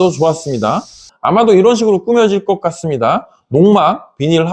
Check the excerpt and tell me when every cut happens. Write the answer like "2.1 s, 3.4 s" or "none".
1.1 s

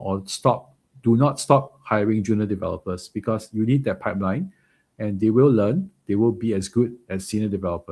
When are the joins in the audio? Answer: none

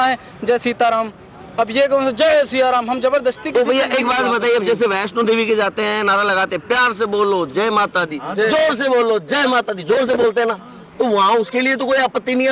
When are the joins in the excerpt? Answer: none

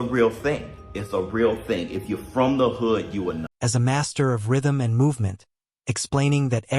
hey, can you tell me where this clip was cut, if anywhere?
3.6 s

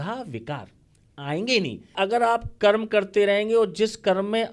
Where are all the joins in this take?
1.8 s

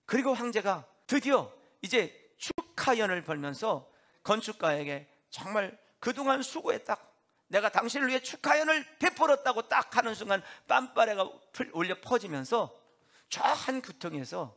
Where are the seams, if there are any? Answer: 0.9 s, 4.1 s

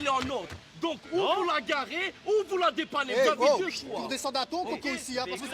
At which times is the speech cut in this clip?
none

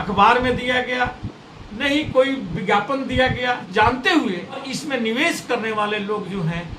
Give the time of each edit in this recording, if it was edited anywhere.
3.6 s, 4.7 s

